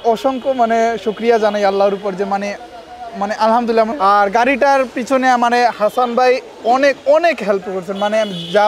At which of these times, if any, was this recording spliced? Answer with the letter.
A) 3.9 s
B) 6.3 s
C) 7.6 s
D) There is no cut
A